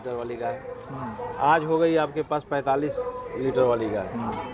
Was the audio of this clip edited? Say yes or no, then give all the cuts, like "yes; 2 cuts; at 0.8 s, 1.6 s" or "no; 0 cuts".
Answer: no; 0 cuts